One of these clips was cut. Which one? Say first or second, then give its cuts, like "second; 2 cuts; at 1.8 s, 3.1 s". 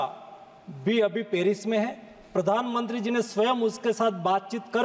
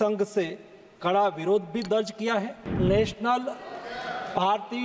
second; 1 cut; at 2.7 s